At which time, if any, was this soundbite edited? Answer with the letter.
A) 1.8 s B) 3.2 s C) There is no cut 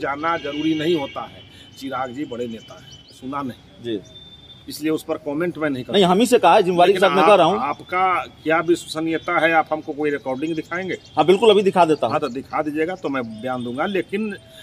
B